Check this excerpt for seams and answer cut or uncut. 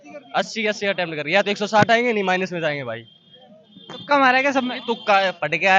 uncut